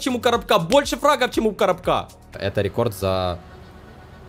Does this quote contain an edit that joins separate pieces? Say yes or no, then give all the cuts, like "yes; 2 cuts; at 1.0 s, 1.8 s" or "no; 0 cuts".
yes; 1 cut; at 2.4 s